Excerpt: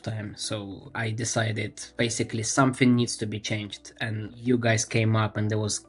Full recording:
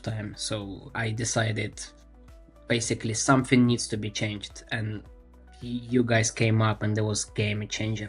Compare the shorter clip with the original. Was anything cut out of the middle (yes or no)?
yes